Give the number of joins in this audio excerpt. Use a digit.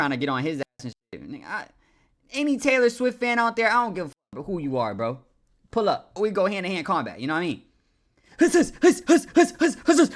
0